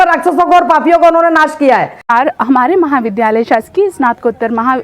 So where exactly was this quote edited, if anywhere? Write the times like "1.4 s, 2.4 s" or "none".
2.1 s